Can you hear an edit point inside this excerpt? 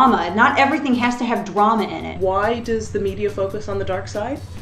yes; 1 cut; at 2.2 s

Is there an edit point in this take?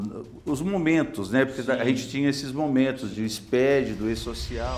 no; 0 cuts

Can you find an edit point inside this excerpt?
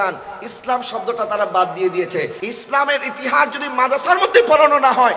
yes; 1 cut; at 2.4 s

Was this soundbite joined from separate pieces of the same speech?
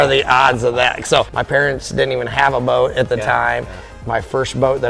yes; 2 cuts; at 1.3 s, 4.0 s

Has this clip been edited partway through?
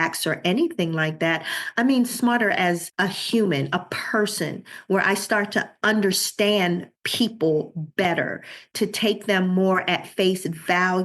yes; 2 cuts; at 2.9 s, 5.7 s

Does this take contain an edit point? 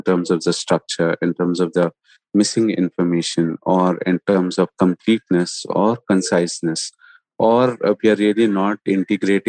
no; 0 cuts

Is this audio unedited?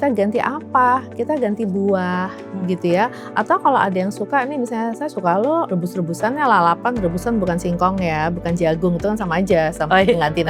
no; 1 cut; at 5.7 s

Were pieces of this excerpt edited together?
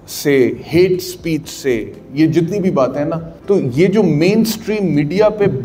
yes; 1 cut; at 3.3 s

